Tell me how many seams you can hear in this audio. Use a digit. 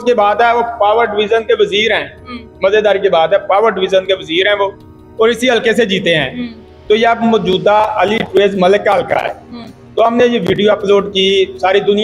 0